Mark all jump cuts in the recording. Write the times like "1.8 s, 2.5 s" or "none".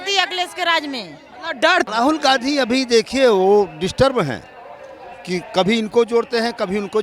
1.8 s

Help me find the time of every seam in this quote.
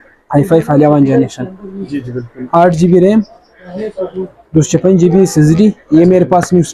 none

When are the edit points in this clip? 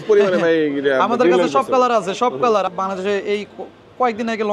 2.7 s

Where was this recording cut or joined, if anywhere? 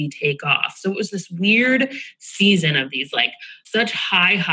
3.6 s

